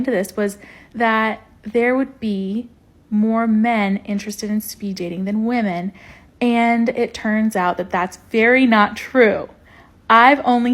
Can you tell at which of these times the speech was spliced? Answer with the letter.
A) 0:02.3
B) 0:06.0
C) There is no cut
B